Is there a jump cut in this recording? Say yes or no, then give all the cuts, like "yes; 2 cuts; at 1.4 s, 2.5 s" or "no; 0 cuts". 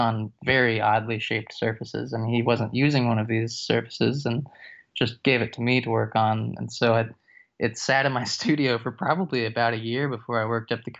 no; 0 cuts